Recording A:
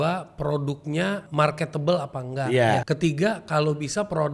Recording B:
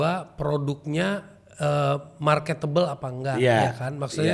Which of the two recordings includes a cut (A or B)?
A